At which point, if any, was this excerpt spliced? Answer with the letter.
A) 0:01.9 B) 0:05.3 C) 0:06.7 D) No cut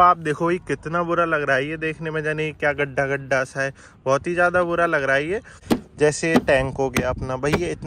B